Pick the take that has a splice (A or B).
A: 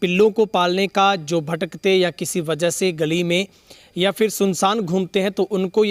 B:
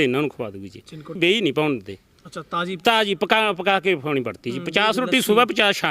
B